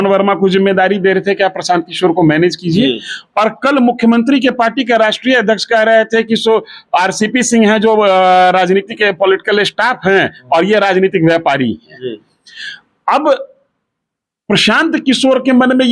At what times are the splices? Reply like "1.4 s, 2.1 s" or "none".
none